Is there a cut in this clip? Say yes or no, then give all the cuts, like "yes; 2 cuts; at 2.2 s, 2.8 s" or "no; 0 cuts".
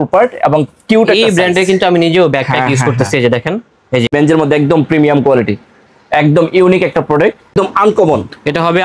yes; 2 cuts; at 4.1 s, 7.5 s